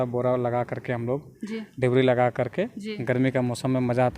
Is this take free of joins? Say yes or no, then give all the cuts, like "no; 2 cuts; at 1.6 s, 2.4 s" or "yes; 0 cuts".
yes; 0 cuts